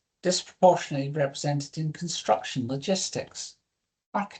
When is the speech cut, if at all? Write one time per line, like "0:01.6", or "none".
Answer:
none